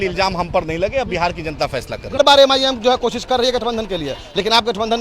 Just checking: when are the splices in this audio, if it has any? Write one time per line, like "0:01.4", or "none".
0:02.2